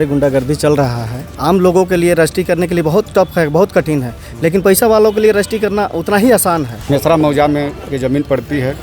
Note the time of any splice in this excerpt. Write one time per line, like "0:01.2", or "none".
0:01.2
0:06.8